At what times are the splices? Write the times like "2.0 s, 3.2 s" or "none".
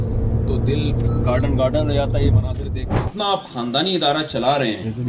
3.0 s

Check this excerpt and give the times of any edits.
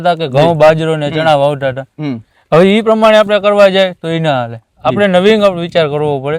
none

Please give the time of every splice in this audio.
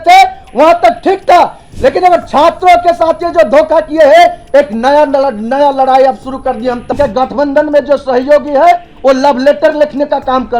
6.9 s

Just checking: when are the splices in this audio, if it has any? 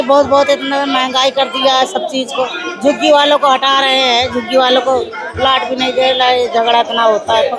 none

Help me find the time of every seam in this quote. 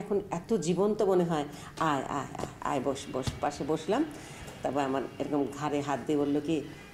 none

